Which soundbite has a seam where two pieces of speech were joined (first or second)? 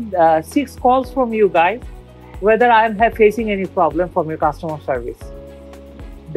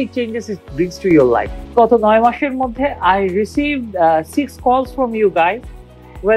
second